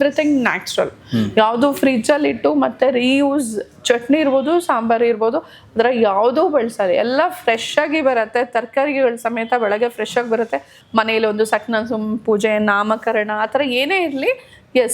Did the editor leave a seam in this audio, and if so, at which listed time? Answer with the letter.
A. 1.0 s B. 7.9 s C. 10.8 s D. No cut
C